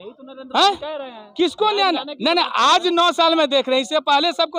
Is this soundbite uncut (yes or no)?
yes